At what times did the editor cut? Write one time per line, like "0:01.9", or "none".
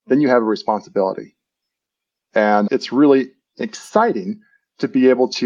0:02.7